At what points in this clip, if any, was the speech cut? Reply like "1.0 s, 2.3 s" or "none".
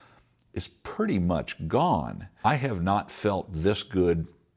2.4 s